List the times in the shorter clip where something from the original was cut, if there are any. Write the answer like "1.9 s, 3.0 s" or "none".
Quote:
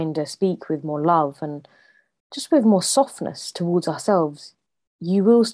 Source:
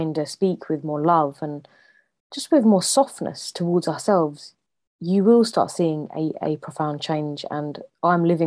none